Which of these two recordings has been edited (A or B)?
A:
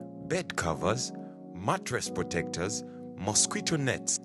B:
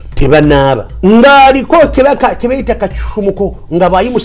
B